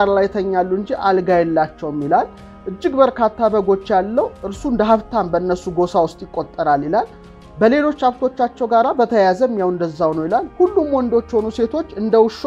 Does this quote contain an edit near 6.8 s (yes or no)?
no